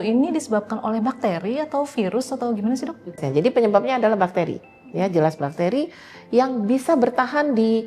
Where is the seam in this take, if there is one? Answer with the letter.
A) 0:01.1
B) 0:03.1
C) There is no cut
B